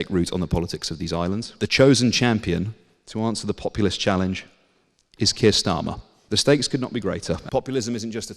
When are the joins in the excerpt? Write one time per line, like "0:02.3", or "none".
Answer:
0:01.5
0:06.1
0:07.4